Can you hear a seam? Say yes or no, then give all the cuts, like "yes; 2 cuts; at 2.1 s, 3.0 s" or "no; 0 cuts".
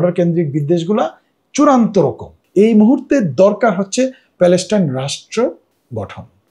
yes; 1 cut; at 2.4 s